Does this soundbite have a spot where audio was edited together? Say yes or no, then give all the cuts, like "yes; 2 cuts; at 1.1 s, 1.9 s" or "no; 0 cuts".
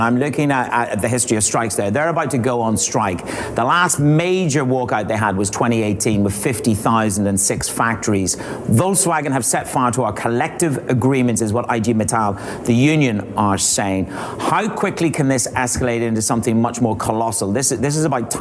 no; 0 cuts